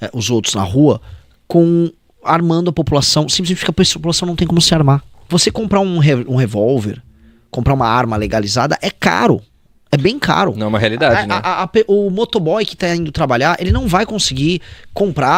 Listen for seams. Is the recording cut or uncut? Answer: uncut